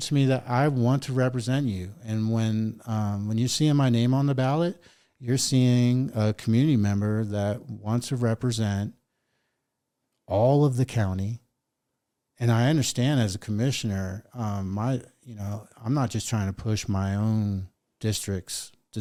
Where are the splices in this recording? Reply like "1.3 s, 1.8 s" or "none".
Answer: none